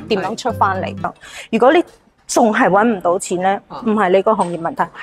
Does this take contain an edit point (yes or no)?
yes